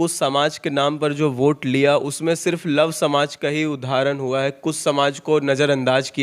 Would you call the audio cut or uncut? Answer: uncut